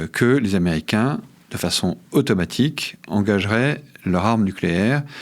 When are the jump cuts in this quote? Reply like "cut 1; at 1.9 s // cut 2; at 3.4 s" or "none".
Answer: none